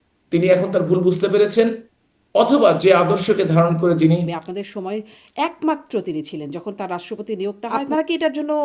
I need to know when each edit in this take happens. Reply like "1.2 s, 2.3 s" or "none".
4.3 s, 7.8 s